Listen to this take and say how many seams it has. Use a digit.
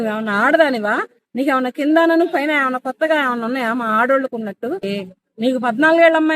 1